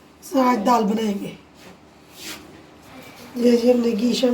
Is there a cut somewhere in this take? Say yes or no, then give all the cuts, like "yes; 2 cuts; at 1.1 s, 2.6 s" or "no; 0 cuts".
no; 0 cuts